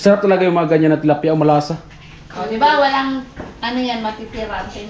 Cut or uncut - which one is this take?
uncut